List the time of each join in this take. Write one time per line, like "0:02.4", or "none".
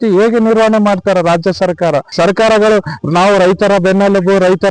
0:02.1